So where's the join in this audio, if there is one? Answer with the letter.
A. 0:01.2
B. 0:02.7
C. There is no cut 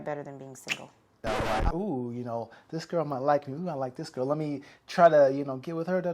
A